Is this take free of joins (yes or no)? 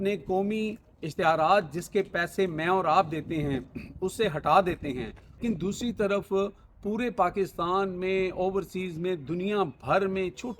no